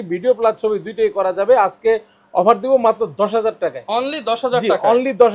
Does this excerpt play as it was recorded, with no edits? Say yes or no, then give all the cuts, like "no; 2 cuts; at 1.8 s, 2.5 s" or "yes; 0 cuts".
yes; 0 cuts